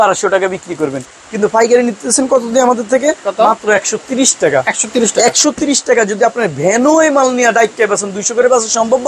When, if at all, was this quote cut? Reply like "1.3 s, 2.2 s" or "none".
none